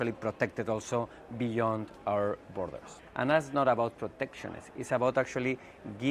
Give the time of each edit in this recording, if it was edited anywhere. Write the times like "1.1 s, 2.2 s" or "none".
2.9 s